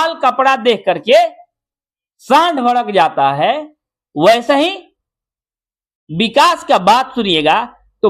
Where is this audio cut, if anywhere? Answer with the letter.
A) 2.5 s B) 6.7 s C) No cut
C